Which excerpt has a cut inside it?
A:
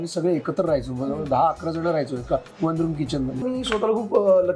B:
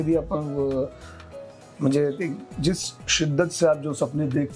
A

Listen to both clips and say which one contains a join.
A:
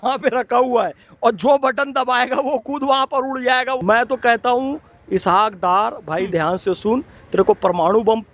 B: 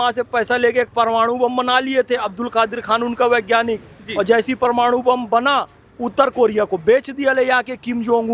A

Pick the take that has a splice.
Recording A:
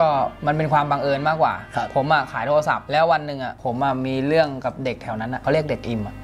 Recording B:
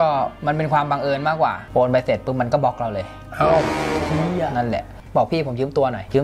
B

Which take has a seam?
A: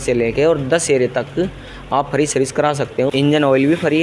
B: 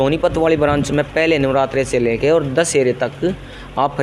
A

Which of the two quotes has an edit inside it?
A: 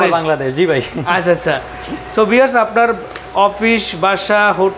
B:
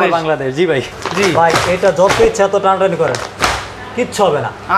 B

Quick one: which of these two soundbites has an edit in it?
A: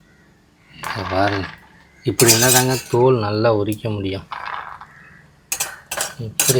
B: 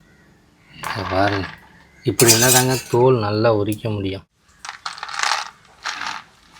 B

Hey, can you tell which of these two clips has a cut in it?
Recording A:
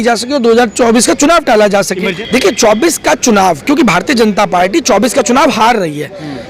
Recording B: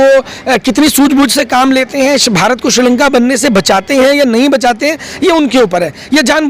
A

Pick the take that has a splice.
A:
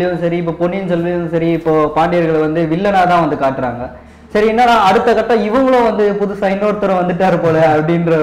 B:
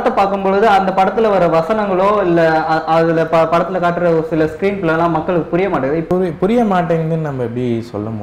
B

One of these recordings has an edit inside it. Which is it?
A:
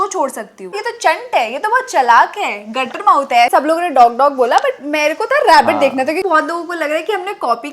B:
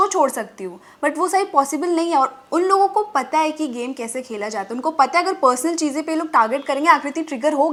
A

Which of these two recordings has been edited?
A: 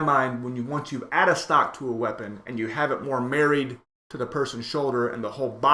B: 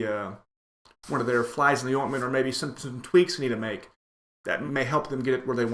B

